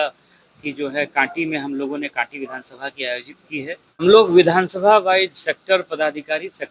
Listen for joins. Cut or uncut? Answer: cut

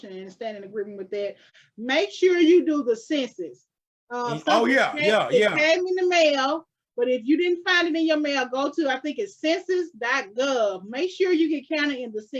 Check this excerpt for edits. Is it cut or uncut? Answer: cut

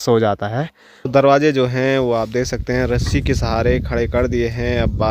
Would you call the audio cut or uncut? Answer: cut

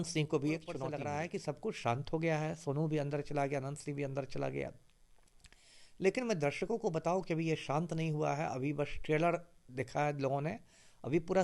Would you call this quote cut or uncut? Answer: cut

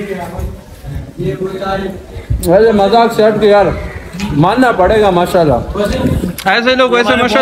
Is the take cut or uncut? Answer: cut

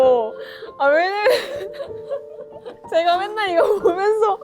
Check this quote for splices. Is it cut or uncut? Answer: cut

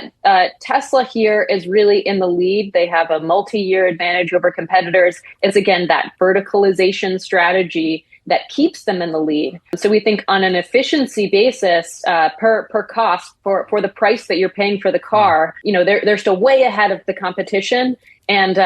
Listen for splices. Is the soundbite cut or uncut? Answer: cut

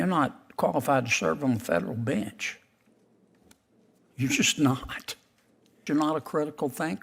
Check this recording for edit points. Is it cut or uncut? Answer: cut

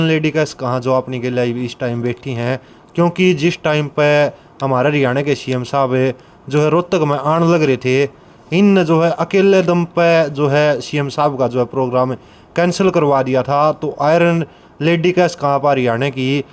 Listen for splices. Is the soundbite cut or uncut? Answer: uncut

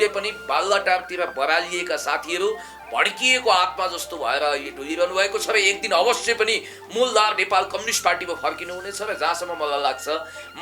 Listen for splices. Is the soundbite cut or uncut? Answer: uncut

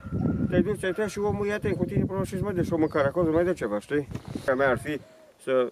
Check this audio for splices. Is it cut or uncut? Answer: cut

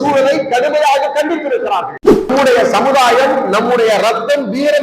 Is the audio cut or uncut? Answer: cut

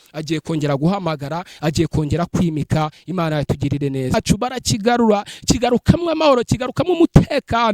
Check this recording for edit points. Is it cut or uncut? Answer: cut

